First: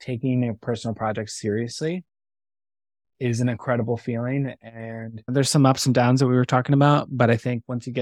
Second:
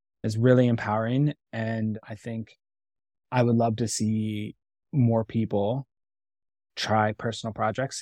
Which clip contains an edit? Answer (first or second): first